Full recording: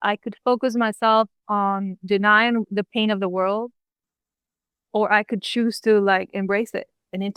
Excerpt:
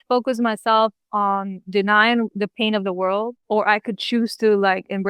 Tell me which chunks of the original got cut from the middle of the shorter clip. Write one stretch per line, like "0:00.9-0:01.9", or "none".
0:03.7-0:04.8